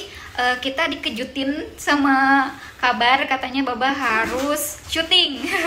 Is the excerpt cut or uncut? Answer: uncut